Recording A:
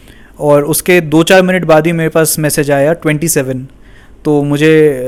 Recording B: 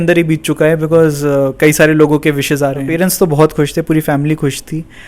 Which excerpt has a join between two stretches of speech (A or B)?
B